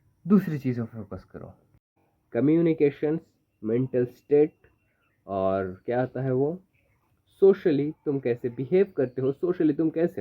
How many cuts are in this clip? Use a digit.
1